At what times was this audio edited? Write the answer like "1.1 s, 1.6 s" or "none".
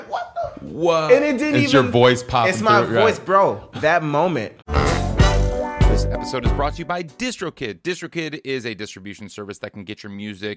3.6 s, 4.6 s